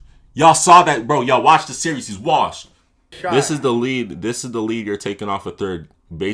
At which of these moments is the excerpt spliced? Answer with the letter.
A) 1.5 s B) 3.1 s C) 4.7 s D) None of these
B